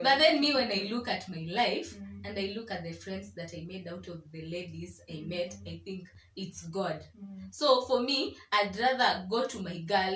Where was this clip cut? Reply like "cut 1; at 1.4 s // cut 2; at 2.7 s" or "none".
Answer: none